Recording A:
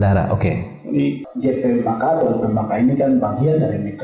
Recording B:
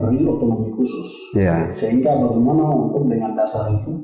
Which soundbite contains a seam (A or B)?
A